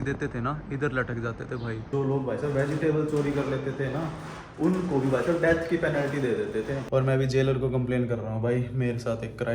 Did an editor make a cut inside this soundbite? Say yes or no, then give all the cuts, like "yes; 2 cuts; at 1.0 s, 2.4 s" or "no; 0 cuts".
yes; 2 cuts; at 1.9 s, 6.8 s